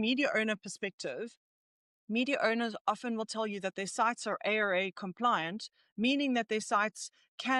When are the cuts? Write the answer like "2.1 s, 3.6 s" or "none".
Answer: none